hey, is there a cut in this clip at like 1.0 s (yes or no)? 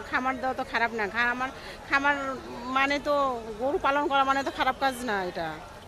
no